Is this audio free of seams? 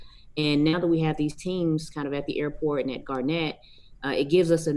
yes; 0 cuts

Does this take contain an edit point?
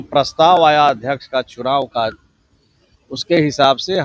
no; 0 cuts

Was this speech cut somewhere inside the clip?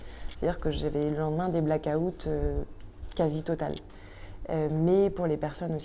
no; 0 cuts

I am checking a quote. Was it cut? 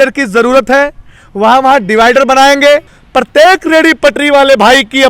yes; 1 cut; at 3.0 s

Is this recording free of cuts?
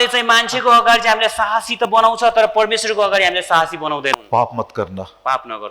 no; 1 cut; at 4.1 s

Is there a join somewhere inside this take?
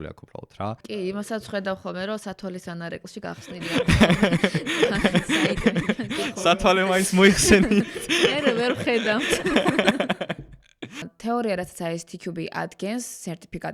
yes; 1 cut; at 11.1 s

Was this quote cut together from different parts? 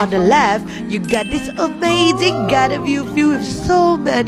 no; 0 cuts

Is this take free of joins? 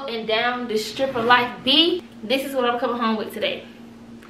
no; 1 cut; at 2.1 s

